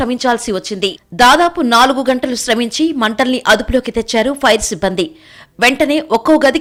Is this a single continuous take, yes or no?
yes